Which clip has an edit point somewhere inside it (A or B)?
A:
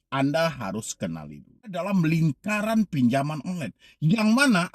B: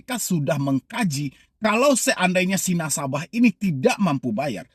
A